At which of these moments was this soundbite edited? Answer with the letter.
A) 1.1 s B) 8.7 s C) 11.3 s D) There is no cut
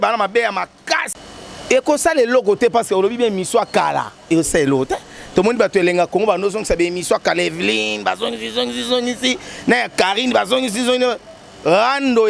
A